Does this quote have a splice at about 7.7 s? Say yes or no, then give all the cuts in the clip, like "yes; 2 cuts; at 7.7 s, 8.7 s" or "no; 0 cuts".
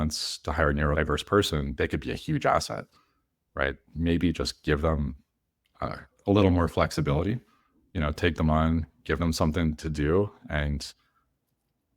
no; 1 cut; at 0.9 s